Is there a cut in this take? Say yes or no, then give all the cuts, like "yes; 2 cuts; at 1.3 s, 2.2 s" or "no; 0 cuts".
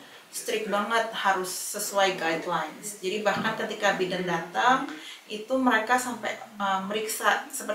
no; 0 cuts